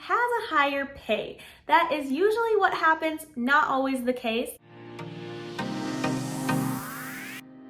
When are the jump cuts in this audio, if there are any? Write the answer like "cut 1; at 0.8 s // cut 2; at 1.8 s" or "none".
cut 1; at 4.5 s